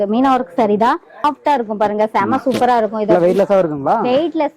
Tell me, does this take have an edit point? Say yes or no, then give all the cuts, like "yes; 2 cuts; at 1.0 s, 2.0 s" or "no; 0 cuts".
yes; 1 cut; at 1.2 s